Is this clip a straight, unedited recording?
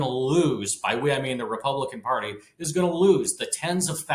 yes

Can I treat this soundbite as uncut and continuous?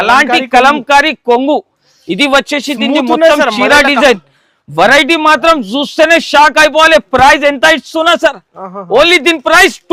yes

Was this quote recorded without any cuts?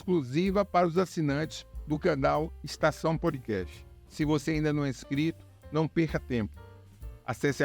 no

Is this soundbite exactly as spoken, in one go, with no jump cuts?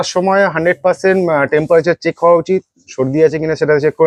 yes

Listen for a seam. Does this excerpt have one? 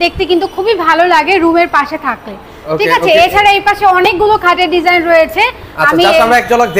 no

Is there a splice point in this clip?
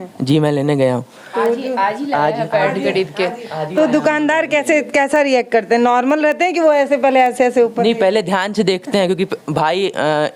no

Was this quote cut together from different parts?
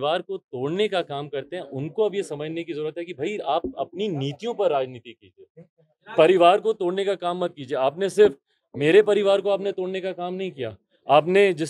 no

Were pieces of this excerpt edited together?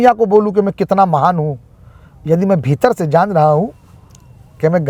no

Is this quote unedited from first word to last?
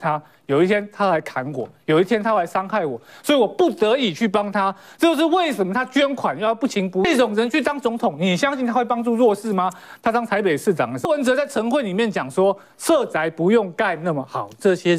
no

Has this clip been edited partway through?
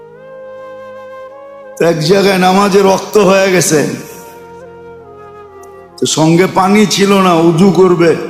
yes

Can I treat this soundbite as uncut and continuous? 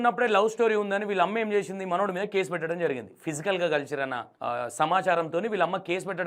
yes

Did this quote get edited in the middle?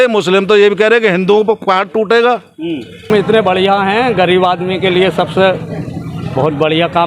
yes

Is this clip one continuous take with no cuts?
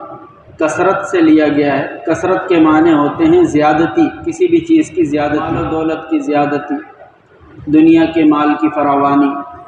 no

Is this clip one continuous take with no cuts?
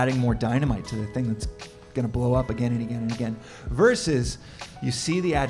yes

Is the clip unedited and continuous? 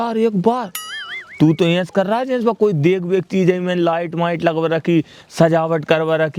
yes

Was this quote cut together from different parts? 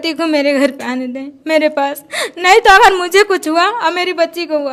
no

